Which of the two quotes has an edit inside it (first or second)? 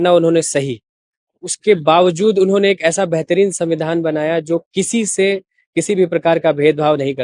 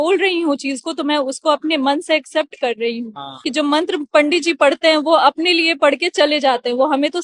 second